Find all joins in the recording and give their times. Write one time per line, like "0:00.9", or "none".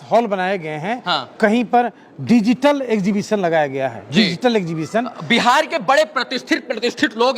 none